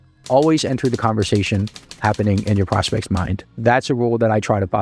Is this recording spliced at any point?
yes; 1 cut; at 3.5 s

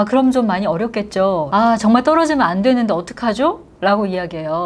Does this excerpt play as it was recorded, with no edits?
no; 1 cut; at 1.5 s

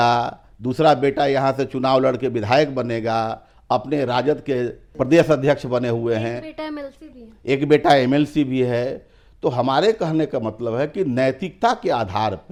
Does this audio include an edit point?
no; 0 cuts

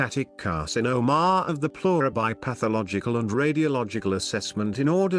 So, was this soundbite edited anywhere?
no; 0 cuts

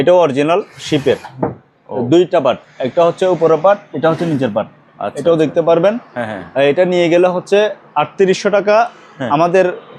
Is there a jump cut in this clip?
no; 0 cuts

